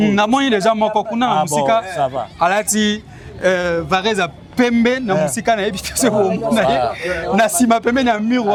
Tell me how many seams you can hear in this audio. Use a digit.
0